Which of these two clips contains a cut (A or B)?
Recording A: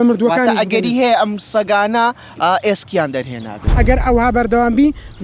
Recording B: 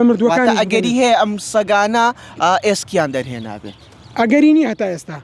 A